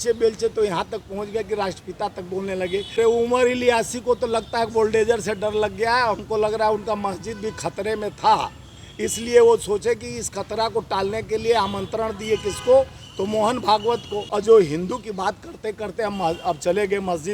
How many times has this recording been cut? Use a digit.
2